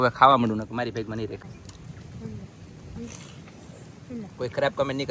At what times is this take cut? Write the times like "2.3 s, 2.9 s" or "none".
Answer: 1.4 s